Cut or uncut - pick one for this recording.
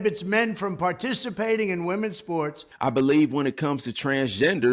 cut